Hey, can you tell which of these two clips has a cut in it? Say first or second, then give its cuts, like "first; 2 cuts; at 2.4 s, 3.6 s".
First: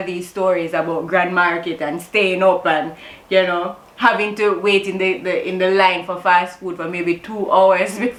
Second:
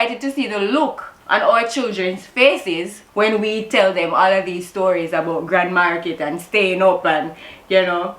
second; 2 cuts; at 1.1 s, 3.0 s